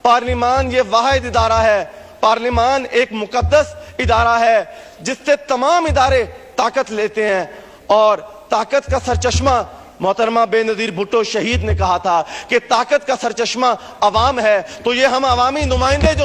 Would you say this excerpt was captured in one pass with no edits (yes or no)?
yes